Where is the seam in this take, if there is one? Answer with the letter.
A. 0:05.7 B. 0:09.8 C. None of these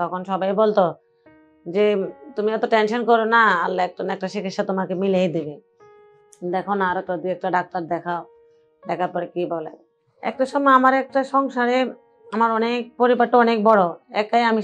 B